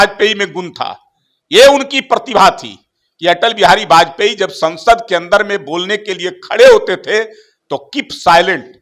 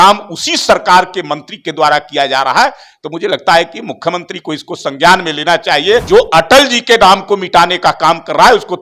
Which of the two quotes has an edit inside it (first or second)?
second